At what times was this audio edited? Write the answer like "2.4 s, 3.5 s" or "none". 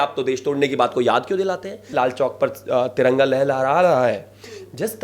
1.9 s

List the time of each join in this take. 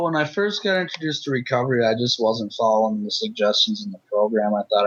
none

